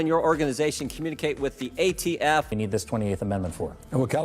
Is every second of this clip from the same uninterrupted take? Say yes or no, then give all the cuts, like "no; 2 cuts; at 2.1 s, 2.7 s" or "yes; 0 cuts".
no; 1 cut; at 2.5 s